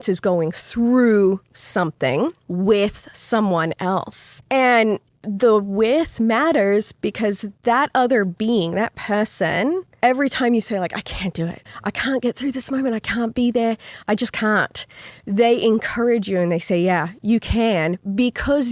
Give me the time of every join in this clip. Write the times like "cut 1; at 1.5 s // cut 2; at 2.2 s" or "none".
cut 1; at 4.3 s // cut 2; at 9.9 s // cut 3; at 11.7 s // cut 4; at 13.9 s